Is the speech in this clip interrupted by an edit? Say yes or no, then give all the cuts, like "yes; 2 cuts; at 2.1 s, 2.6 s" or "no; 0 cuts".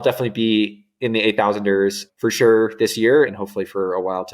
yes; 1 cut; at 3.3 s